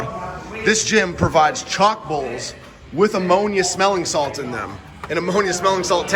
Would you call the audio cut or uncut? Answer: uncut